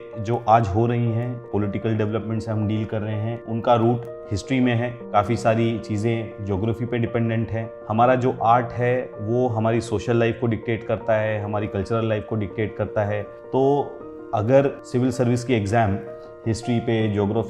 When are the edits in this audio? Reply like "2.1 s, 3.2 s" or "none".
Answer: 1.4 s, 3.4 s, 5.1 s, 7.7 s, 13.4 s, 14.8 s